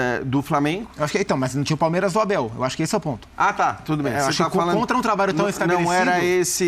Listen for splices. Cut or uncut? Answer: uncut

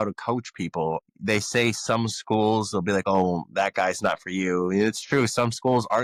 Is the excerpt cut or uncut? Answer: uncut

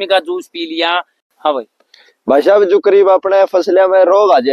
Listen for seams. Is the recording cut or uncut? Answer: cut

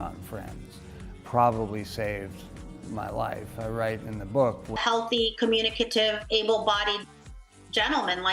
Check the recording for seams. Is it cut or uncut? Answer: cut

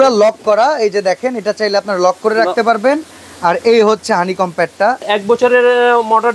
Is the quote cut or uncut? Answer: cut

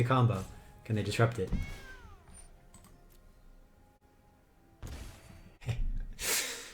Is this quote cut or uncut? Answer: cut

